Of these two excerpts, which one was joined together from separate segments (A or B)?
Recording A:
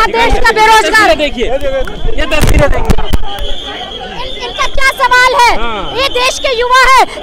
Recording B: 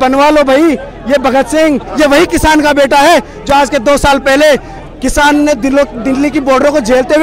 B